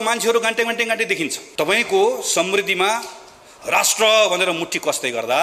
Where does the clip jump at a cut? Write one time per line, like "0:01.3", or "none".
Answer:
0:01.4